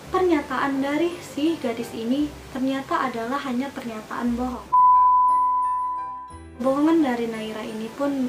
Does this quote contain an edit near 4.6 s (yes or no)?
yes